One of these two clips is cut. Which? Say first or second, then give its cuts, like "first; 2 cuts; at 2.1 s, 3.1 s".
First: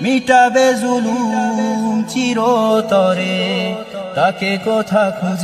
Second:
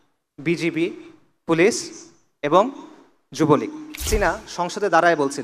second; 1 cut; at 4.1 s